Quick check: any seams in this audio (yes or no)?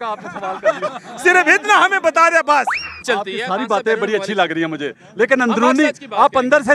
yes